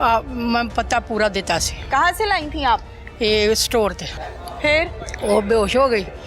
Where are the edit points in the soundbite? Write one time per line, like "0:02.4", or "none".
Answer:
0:04.1

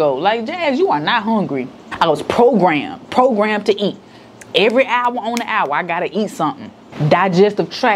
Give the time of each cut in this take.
none

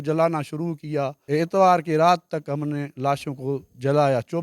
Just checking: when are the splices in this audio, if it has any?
0:01.2

